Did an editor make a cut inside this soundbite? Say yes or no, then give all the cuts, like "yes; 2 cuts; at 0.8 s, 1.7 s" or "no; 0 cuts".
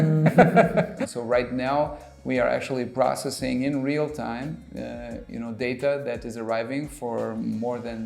yes; 1 cut; at 0.9 s